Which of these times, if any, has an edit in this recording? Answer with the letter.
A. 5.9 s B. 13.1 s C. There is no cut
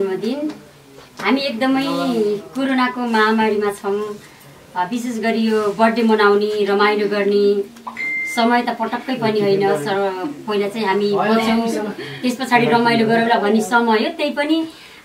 C